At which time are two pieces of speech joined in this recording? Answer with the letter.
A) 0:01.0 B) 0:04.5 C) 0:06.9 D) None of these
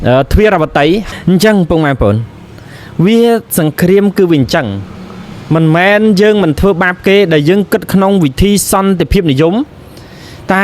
A